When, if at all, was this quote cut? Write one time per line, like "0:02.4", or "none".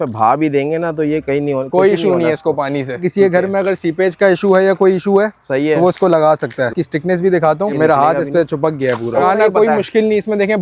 0:03.1
0:06.7
0:07.8
0:09.2

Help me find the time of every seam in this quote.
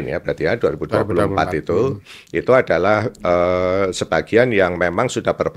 none

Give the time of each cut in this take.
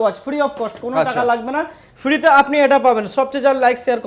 none

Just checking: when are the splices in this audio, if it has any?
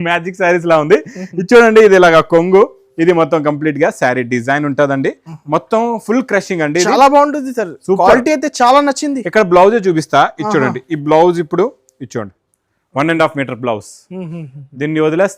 none

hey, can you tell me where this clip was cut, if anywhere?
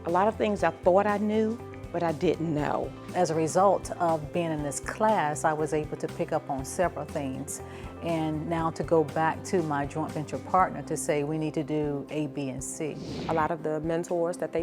0:03.0
0:13.1

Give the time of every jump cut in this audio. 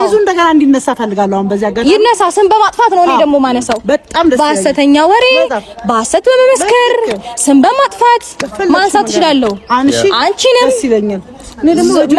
none

